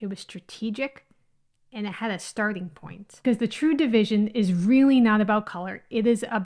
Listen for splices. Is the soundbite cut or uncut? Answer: cut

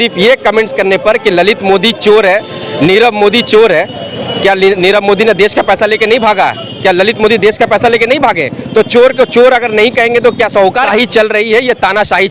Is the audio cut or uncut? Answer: cut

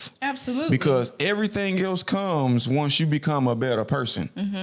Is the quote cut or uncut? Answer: uncut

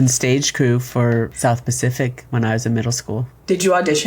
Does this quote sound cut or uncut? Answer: cut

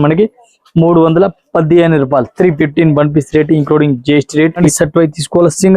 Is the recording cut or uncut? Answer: cut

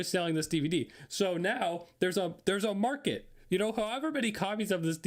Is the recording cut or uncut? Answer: uncut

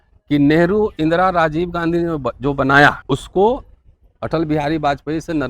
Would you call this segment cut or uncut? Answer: cut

